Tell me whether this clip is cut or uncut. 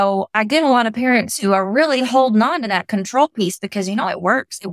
uncut